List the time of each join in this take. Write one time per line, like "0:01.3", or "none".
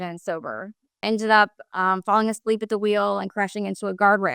0:01.0